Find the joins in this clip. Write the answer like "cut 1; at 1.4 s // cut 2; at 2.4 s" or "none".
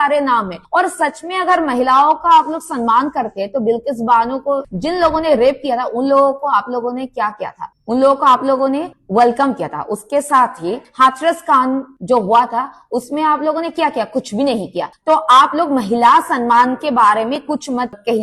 none